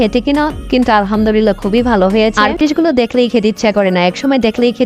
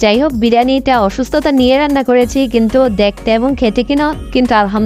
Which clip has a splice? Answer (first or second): first